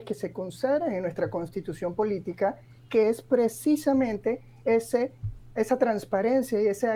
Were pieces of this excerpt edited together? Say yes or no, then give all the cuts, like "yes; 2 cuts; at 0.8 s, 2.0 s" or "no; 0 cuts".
no; 0 cuts